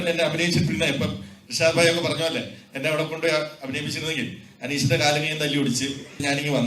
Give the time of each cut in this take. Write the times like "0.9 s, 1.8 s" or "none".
none